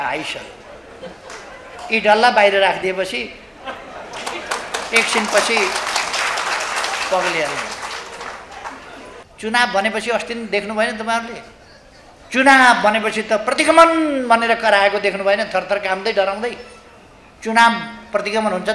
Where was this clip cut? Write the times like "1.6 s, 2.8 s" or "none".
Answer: 9.2 s